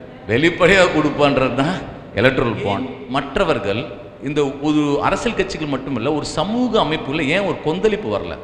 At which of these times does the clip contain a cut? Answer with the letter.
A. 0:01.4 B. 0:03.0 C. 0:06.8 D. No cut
B